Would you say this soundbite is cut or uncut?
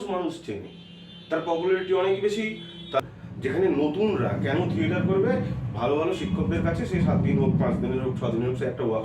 cut